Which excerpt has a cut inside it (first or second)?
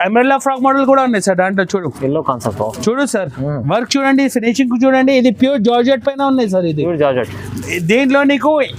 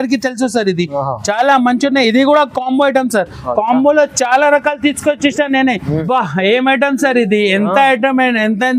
second